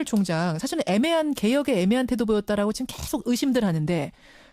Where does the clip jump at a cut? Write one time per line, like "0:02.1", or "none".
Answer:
none